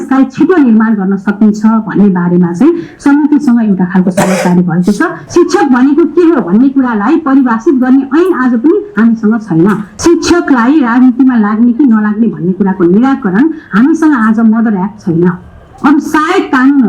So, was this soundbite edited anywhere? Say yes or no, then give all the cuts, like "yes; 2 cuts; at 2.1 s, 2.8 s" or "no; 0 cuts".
yes; 2 cuts; at 5.2 s, 9.9 s